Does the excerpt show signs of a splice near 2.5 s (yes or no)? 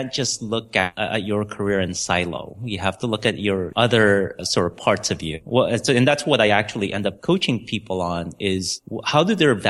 no